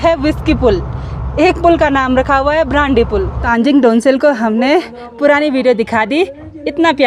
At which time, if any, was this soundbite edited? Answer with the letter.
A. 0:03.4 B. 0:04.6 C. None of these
A